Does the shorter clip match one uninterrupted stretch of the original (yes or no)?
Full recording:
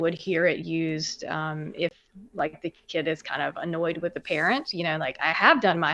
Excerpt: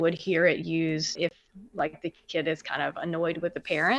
no